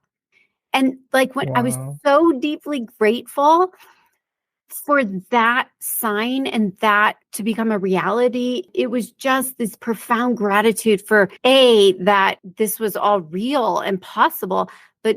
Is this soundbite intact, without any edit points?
no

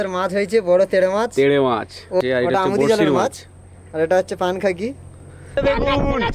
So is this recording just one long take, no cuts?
no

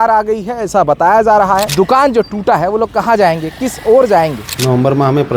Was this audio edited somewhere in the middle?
yes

